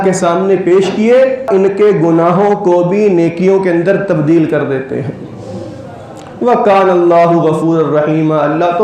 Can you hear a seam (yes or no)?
yes